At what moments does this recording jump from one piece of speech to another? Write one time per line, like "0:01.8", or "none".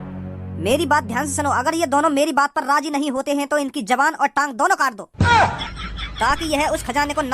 0:05.0